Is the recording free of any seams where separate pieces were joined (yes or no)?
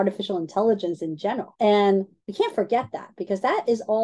no